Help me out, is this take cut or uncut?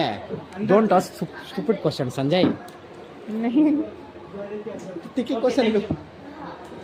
uncut